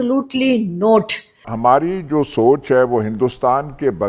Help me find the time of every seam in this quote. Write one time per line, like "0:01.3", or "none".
0:01.5